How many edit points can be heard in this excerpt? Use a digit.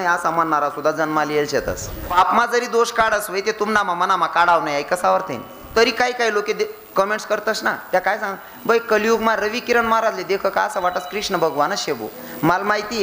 2